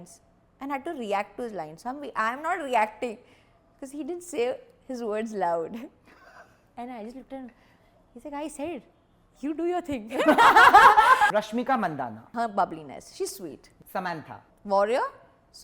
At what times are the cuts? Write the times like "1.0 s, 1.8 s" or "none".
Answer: 11.3 s